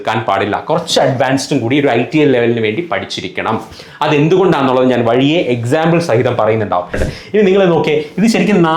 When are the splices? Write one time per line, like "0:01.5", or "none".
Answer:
0:07.0